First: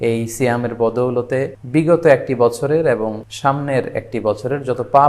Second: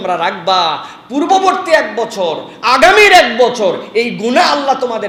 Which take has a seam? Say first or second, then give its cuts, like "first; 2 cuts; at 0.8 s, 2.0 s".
first; 2 cuts; at 1.6 s, 3.3 s